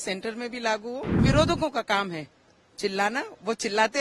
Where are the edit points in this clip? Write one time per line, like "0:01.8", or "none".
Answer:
0:01.2